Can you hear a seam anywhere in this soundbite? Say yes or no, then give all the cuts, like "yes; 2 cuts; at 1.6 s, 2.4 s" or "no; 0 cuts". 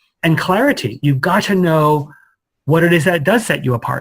no; 0 cuts